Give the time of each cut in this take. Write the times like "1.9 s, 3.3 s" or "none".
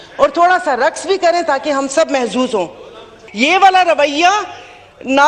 3.2 s

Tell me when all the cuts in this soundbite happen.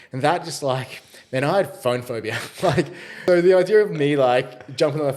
3.1 s

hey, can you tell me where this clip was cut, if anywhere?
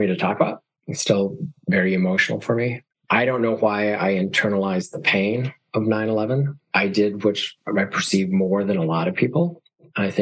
2.9 s, 6.5 s

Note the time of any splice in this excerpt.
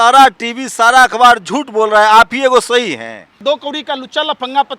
3.4 s

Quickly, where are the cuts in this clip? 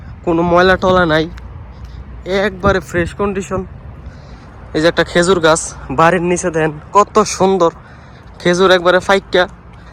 none

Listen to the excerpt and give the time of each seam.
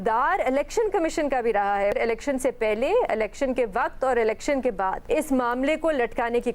1.9 s, 5.0 s

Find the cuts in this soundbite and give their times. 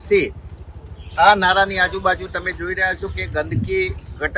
none

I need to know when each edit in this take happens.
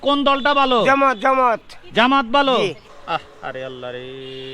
2.8 s

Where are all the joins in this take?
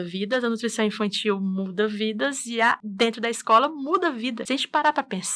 2.9 s, 4.4 s

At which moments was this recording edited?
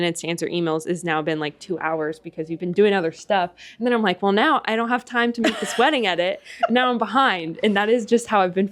none

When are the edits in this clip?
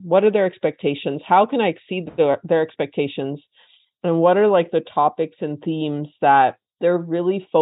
6.7 s

